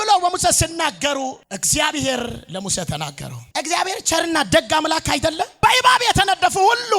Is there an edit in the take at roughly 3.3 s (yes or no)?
yes